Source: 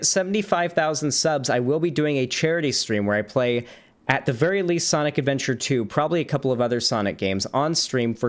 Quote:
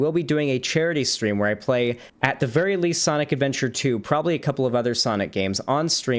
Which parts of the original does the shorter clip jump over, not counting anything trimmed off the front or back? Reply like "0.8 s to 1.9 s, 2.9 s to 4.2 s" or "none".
3.8 s to 3.9 s